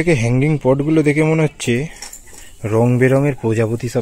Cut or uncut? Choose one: uncut